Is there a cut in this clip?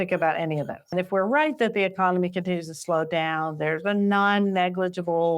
yes; 1 cut; at 0.9 s

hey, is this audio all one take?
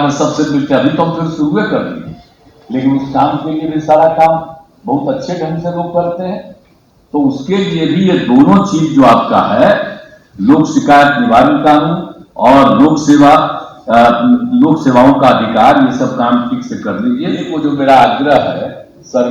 no; 1 cut; at 17.5 s

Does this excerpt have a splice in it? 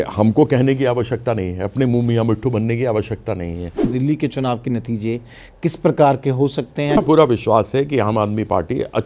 yes; 2 cuts; at 3.9 s, 6.9 s

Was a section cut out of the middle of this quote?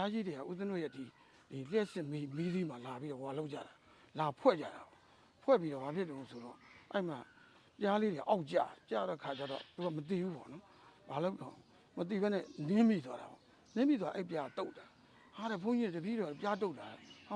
no; 0 cuts

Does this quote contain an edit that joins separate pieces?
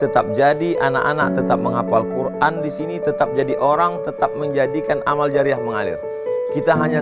no; 0 cuts

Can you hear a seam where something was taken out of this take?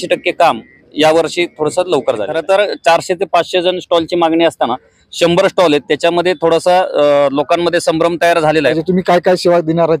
yes; 2 cuts; at 2.3 s, 8.8 s

